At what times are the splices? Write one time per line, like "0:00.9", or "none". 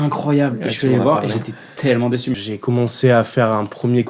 0:02.4